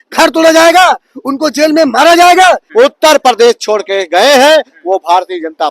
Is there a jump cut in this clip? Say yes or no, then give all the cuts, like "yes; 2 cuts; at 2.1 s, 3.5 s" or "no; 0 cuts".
yes; 1 cut; at 2.6 s